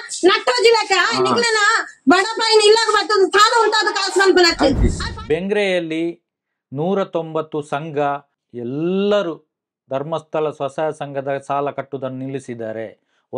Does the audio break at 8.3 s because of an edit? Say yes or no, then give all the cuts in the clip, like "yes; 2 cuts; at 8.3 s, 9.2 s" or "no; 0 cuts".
yes; 2 cuts; at 5.0 s, 8.3 s